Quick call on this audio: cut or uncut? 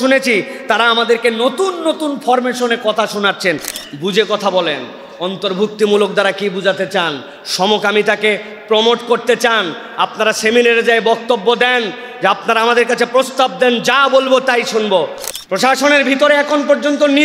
cut